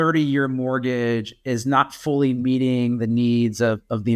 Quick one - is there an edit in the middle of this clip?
no; 0 cuts

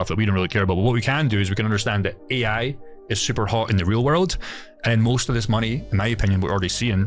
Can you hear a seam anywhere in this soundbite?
no; 0 cuts

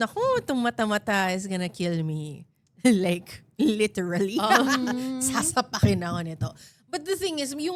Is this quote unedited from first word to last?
yes; 0 cuts

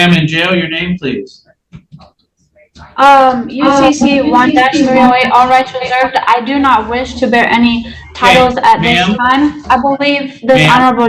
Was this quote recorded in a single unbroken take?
yes; 0 cuts

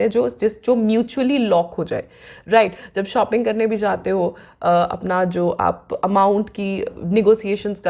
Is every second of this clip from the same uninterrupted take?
yes; 0 cuts

